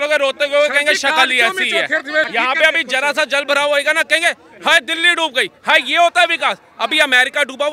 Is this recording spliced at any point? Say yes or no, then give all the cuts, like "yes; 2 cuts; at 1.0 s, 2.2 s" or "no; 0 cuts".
yes; 1 cut; at 2.3 s